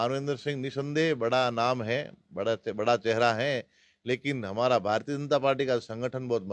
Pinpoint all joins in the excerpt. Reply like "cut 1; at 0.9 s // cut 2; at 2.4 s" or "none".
none